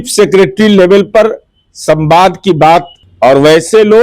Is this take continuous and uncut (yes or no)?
no